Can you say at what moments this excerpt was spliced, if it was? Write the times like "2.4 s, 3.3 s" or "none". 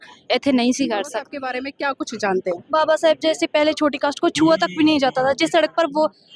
1.4 s